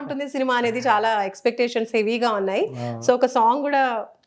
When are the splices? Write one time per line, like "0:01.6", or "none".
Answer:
none